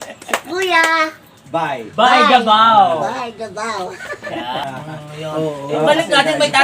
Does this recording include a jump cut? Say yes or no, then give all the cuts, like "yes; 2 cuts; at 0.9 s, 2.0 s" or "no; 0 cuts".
yes; 1 cut; at 4.6 s